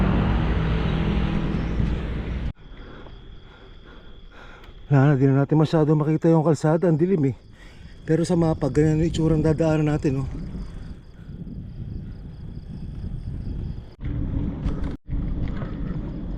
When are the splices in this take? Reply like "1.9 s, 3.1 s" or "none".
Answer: 2.5 s, 13.9 s